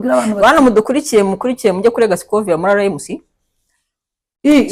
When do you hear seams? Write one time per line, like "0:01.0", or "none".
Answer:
none